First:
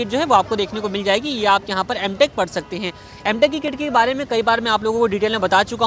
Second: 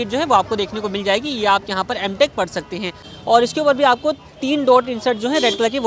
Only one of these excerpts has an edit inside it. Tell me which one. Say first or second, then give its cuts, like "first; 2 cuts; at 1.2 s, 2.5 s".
second; 1 cut; at 3.1 s